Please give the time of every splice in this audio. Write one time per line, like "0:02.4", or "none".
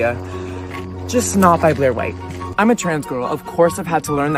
none